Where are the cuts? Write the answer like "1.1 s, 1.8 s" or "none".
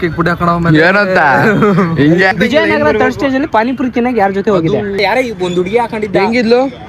2.3 s, 5.0 s